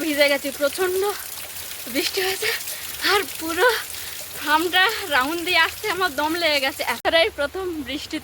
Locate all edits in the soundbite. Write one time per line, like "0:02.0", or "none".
0:07.0